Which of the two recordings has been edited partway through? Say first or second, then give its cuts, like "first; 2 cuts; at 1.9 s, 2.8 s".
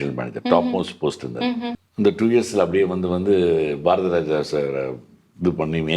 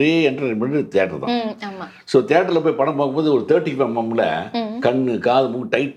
first; 1 cut; at 1.8 s